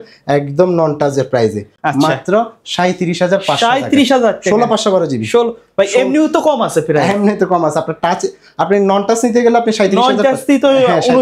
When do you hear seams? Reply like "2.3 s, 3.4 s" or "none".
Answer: none